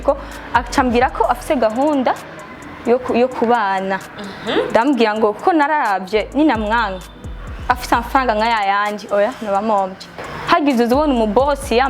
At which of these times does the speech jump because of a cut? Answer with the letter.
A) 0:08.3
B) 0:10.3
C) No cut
B